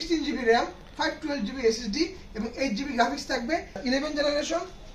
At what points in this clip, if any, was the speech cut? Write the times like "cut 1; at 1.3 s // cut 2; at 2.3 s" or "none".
cut 1; at 3.7 s